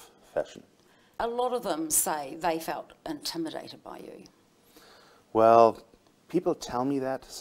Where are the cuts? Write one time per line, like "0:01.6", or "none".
0:01.1